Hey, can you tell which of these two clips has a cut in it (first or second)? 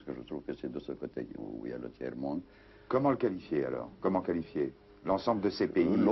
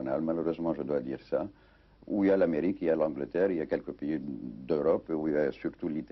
second